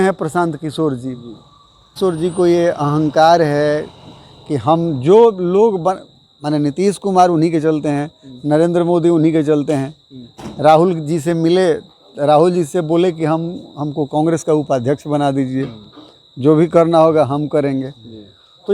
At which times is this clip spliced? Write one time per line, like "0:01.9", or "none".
0:02.0